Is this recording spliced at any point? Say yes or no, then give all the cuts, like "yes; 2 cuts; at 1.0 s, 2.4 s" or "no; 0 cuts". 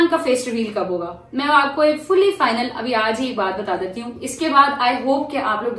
no; 0 cuts